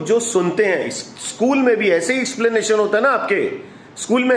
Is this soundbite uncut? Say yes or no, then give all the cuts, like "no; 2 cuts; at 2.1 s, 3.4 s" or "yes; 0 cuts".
yes; 0 cuts